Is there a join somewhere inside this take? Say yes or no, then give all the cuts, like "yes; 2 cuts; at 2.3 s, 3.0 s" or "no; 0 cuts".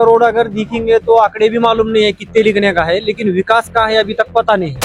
no; 0 cuts